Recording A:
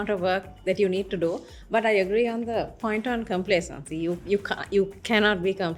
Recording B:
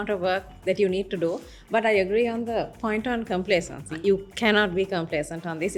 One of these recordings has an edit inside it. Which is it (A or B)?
B